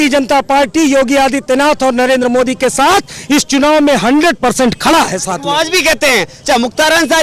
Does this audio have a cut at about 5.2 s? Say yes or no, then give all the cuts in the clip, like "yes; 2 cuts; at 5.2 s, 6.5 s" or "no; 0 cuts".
no; 0 cuts